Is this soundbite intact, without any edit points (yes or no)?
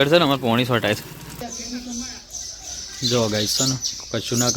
no